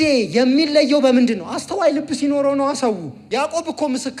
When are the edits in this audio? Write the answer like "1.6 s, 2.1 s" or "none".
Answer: 3.2 s